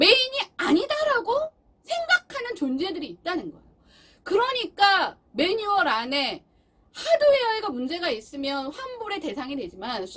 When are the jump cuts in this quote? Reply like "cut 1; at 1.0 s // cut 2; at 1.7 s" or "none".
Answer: none